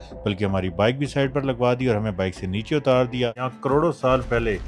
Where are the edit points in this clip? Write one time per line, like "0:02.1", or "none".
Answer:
0:03.5